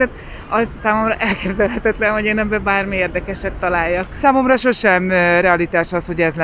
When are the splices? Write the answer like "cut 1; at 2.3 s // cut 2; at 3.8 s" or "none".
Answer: cut 1; at 4.2 s

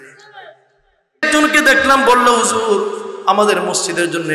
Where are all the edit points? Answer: cut 1; at 1.3 s

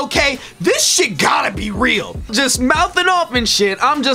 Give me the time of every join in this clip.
cut 1; at 2.3 s

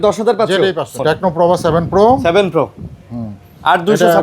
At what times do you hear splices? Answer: cut 1; at 0.9 s

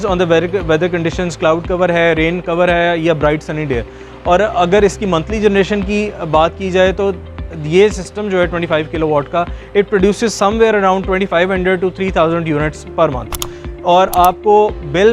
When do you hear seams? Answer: none

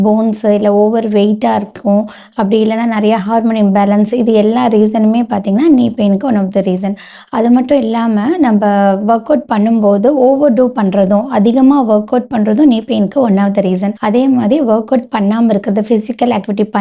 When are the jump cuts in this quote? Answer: none

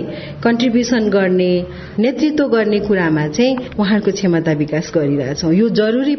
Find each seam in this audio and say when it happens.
cut 1; at 1.9 s

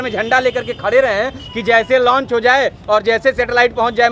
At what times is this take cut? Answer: none

